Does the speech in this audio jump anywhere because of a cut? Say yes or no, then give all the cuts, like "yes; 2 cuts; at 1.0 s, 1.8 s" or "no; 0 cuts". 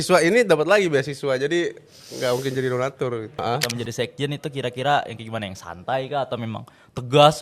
yes; 1 cut; at 3.3 s